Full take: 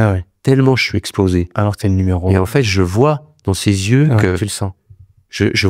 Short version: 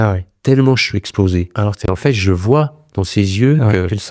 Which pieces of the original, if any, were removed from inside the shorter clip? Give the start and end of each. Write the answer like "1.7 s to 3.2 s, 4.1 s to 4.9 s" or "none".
1.9 s to 2.4 s